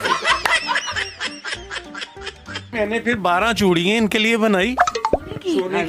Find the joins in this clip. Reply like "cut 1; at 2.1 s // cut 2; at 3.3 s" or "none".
none